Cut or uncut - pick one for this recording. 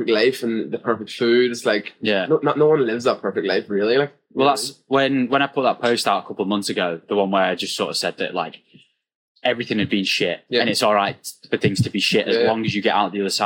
uncut